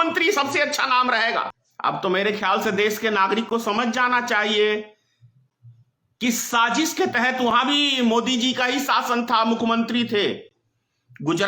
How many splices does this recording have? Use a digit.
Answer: 1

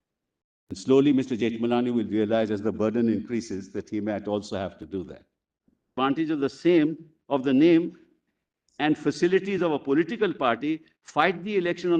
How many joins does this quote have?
2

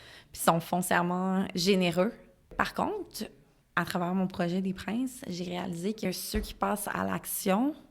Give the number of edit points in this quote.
3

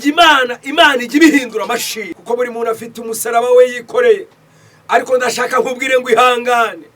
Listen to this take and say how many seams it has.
1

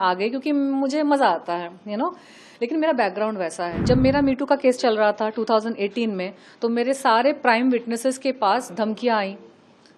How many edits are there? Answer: 1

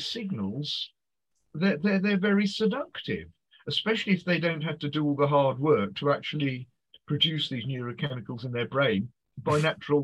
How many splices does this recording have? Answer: 1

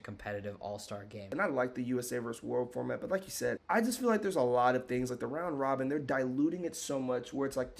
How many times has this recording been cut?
2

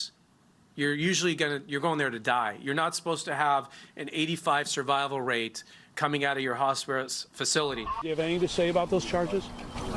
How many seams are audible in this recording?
1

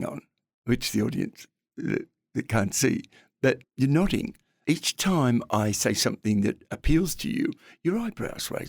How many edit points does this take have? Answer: 2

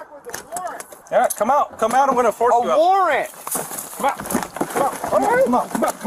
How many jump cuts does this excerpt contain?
1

